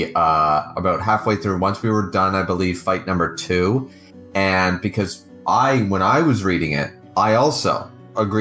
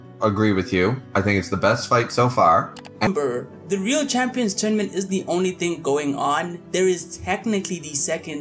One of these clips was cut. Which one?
second; 1 cut; at 3.1 s

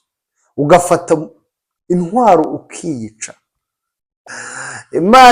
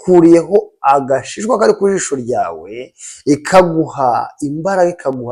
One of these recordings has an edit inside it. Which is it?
first; 1 cut; at 4.3 s

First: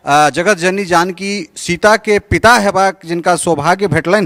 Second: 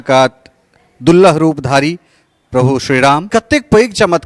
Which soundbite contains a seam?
second; 1 cut; at 3.3 s

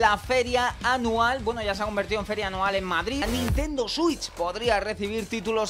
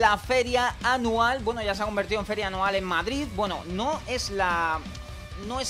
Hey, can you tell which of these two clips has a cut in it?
first; 1 cut; at 3.2 s

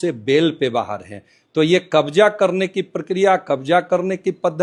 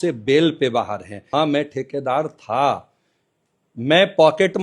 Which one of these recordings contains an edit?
second; 1 cut; at 1.3 s

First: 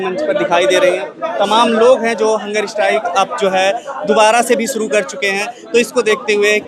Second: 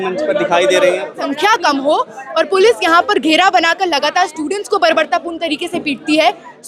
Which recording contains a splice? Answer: second; 1 cut; at 1.2 s

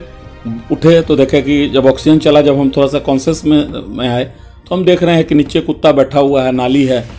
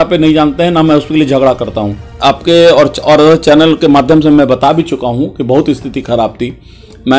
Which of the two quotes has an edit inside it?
second; 1 cut; at 2.1 s

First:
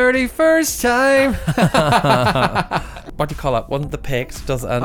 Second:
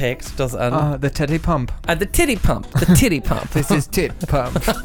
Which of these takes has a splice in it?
first; 1 cut; at 3.0 s

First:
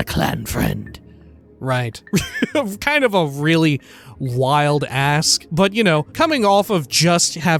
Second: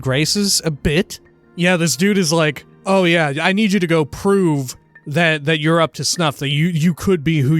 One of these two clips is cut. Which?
second; 1 cut; at 2.7 s

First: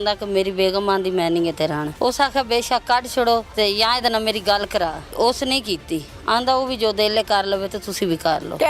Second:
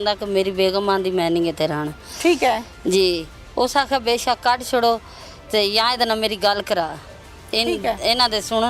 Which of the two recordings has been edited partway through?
first; 3 cuts; at 1.9 s, 3.5 s, 5.1 s

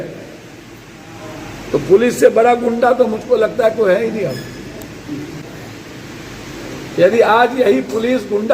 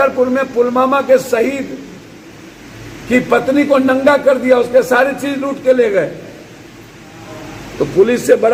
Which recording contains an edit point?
first; 1 cut; at 5.4 s

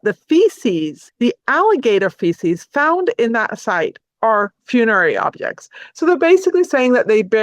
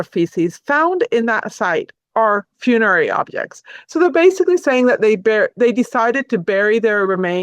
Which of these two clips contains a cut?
first; 1 cut; at 1.0 s

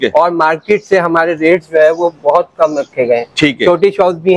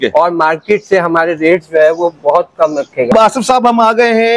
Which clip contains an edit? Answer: second; 1 cut; at 3.1 s

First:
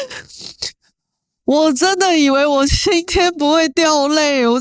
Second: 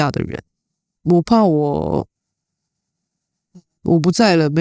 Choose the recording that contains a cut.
second; 1 cut; at 0.9 s

